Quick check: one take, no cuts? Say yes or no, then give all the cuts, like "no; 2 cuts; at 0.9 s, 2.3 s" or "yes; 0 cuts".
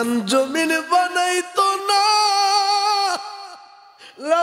yes; 0 cuts